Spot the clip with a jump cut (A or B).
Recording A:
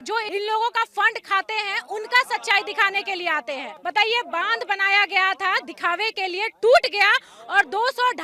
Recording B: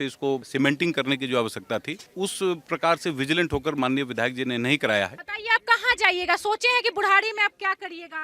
B